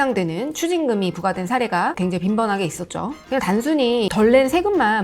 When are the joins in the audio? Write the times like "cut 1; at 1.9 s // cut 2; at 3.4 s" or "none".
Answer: cut 1; at 3.2 s